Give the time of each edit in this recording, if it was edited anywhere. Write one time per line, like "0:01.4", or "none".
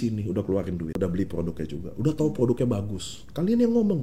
0:00.9